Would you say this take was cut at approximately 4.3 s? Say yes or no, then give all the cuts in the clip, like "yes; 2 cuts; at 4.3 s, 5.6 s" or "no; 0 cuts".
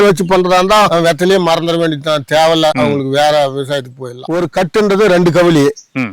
yes; 1 cut; at 4.3 s